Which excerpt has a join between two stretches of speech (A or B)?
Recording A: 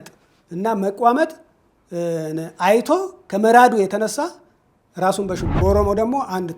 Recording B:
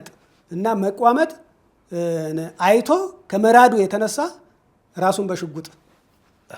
A